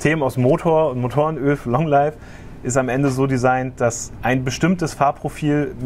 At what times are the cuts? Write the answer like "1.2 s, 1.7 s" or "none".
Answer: none